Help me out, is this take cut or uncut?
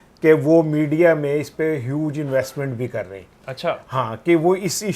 uncut